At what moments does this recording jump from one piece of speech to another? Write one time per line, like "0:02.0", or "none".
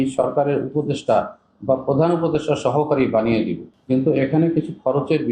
0:03.7